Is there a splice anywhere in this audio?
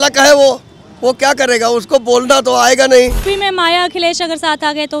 yes; 1 cut; at 3.2 s

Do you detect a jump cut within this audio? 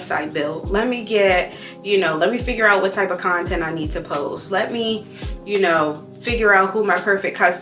no; 0 cuts

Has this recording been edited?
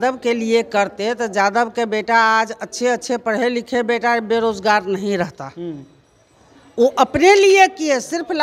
no; 0 cuts

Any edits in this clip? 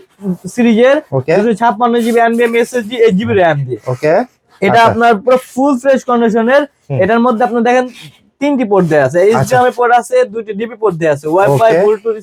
no; 0 cuts

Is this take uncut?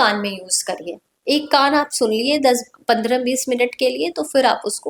yes; 0 cuts

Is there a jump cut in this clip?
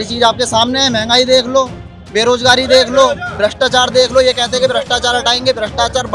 no; 0 cuts

